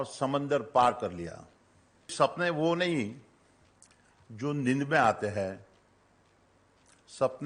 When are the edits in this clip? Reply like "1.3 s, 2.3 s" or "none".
2.1 s